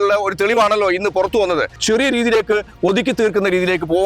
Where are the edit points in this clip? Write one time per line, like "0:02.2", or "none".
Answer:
0:01.7